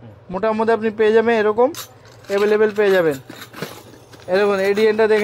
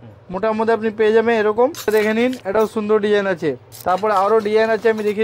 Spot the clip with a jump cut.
second; 2 cuts; at 1.9 s, 3.7 s

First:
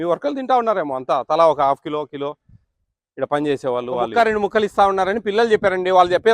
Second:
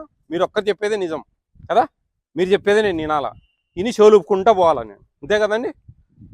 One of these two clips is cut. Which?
first; 1 cut; at 4.1 s

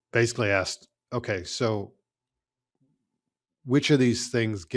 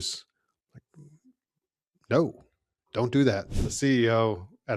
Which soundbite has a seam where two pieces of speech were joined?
second; 1 cut; at 3.6 s

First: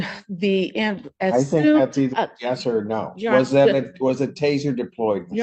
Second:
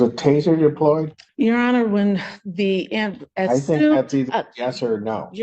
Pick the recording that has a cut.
second; 1 cut; at 1.2 s

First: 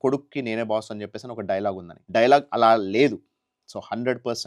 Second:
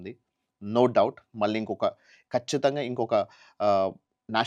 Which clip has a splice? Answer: first; 1 cut; at 1.9 s

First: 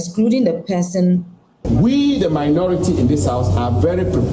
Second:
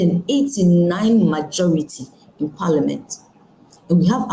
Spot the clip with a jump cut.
first; 1 cut; at 1.6 s

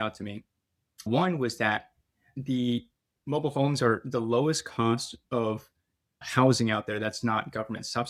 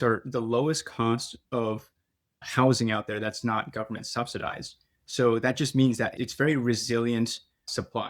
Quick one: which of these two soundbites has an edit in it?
first; 2 cuts; at 1.1 s, 2.3 s

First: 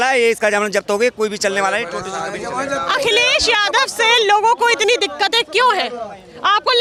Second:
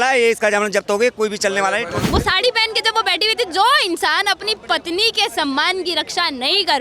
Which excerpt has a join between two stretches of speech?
second; 1 cut; at 2.0 s

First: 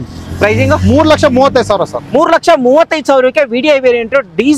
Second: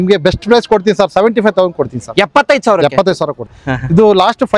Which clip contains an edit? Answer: second; 1 cut; at 3.5 s

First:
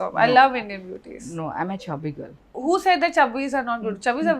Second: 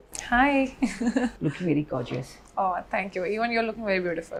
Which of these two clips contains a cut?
first; 1 cut; at 2.5 s

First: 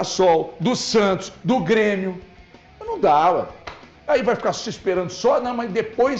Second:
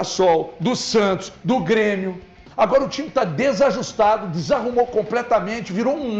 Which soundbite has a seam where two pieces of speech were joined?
second; 1 cut; at 2.4 s

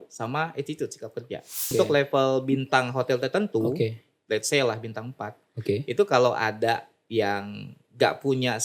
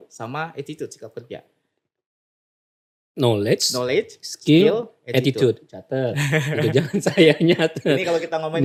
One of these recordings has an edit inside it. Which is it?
first; 1 cut; at 1.7 s

